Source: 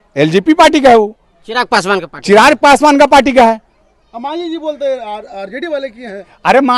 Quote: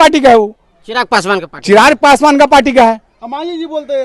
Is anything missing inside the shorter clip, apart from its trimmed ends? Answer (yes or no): yes